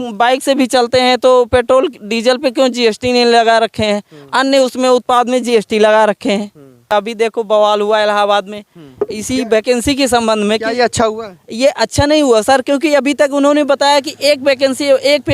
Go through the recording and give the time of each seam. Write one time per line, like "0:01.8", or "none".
0:06.9